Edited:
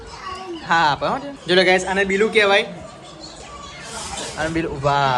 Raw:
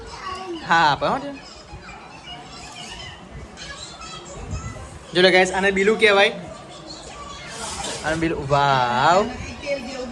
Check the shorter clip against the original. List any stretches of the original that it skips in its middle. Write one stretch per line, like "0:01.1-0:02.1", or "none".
0:01.3-0:05.0